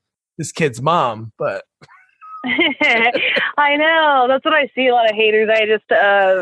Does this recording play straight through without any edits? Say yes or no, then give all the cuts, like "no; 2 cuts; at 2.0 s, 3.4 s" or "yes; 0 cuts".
yes; 0 cuts